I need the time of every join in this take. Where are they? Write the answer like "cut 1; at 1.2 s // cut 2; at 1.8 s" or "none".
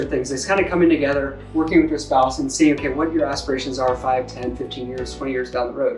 none